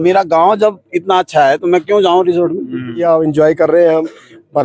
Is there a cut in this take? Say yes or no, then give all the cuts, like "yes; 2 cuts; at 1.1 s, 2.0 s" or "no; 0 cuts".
yes; 1 cut; at 3.0 s